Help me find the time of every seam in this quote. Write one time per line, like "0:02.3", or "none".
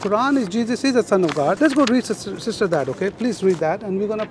0:01.6